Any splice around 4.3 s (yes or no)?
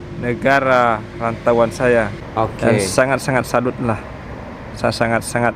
no